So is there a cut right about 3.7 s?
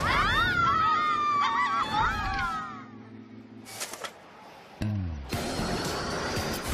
yes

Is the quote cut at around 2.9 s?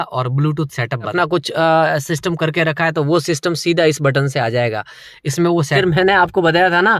no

